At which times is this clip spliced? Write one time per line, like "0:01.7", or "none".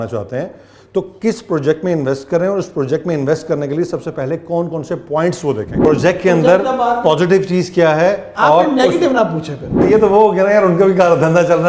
0:05.8
0:09.8